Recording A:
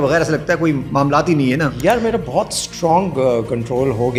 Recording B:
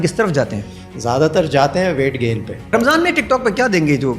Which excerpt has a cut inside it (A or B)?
B